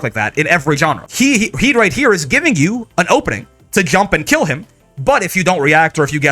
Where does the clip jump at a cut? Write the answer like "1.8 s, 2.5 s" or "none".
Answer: 1.0 s